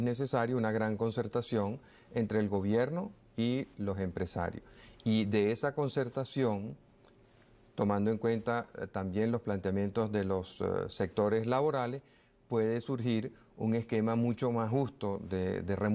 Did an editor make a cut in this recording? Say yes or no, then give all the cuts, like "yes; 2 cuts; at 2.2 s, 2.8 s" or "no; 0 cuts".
yes; 1 cut; at 10.9 s